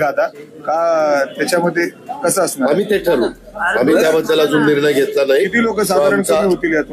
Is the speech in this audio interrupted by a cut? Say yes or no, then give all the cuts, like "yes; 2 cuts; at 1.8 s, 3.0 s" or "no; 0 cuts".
no; 0 cuts